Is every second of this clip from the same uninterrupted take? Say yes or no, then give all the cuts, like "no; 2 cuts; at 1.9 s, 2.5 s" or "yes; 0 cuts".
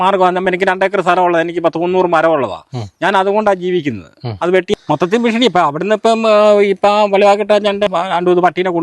no; 2 cuts; at 4.7 s, 7.9 s